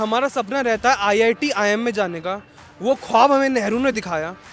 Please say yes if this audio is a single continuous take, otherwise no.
yes